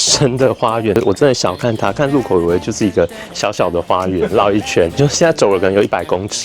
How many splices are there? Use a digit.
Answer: 2